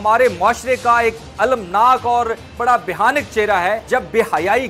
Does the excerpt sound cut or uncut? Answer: cut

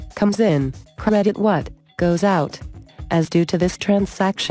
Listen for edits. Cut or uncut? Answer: cut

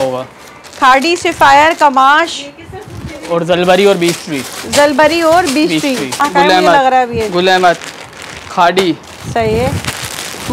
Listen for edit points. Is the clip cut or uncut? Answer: cut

